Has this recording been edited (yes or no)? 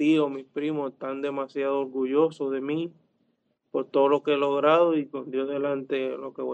no